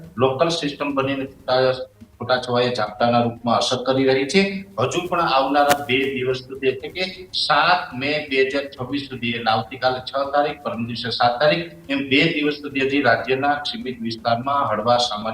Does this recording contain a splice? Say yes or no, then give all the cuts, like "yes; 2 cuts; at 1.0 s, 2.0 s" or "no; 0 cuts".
no; 0 cuts